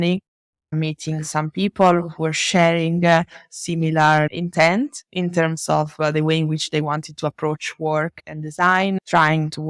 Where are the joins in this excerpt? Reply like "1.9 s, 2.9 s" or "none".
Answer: none